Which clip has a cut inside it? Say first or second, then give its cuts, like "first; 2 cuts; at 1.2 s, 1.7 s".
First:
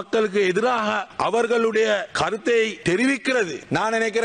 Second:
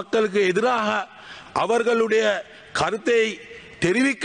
first; 3 cuts; at 1.1 s, 2.1 s, 3.2 s